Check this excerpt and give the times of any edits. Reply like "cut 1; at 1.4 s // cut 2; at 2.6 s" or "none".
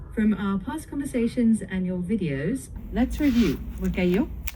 cut 1; at 2.7 s